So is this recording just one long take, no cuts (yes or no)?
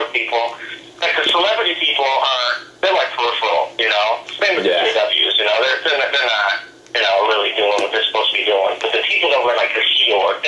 yes